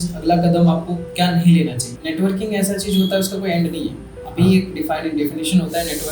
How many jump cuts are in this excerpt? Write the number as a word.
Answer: one